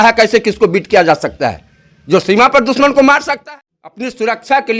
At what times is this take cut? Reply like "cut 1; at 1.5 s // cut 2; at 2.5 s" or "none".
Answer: cut 1; at 3.2 s

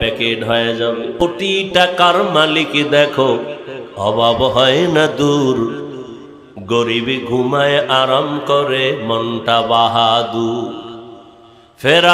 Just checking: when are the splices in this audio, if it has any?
cut 1; at 1.2 s

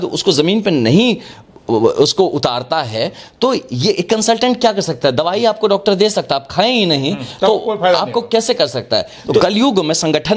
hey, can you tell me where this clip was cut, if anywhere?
cut 1; at 9.4 s

